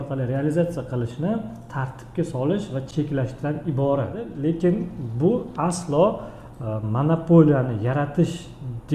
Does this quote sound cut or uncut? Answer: cut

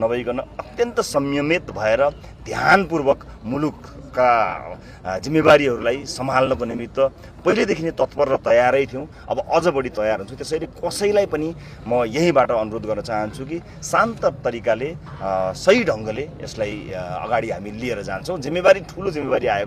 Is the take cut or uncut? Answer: uncut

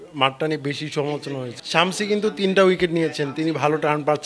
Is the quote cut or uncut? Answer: cut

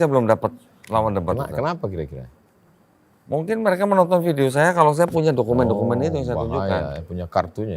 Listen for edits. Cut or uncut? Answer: uncut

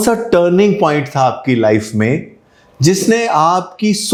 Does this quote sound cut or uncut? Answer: uncut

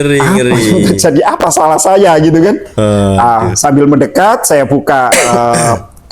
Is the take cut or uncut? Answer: uncut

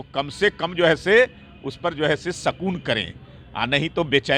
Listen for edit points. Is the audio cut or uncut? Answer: uncut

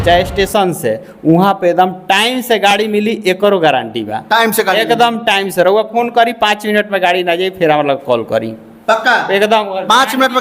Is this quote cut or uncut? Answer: uncut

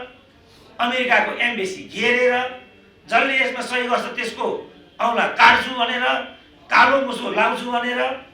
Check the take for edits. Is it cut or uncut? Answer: uncut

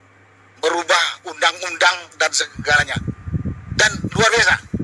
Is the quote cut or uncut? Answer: uncut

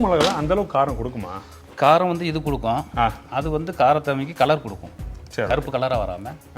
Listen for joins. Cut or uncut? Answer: cut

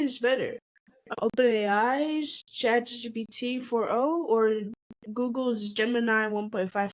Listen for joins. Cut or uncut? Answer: cut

